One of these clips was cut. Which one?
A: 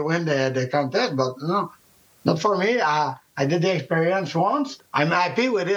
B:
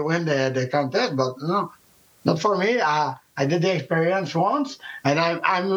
A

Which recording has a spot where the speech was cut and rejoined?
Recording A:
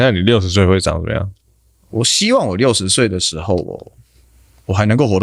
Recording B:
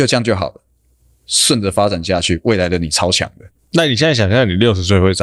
A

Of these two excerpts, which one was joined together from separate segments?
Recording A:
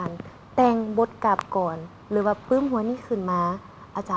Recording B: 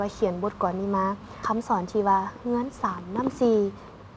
B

